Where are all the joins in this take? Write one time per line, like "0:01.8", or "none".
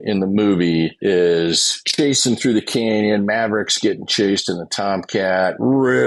0:01.0
0:01.7